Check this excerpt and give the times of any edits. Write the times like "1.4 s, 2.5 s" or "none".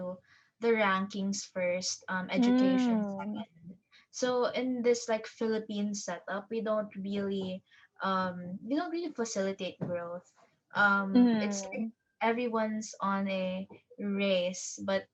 none